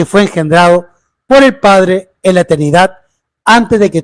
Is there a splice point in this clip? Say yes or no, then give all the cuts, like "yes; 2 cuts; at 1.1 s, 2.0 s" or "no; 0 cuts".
no; 0 cuts